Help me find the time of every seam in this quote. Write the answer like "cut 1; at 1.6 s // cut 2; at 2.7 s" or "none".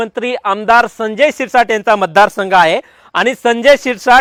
none